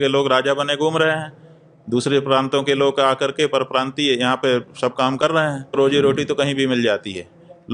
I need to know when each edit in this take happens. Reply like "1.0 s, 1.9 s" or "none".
5.8 s